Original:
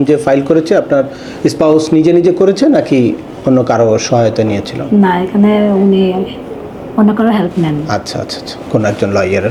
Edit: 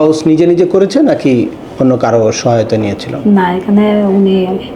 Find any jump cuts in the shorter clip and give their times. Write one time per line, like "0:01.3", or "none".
none